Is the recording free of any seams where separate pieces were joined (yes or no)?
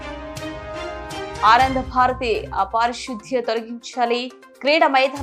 no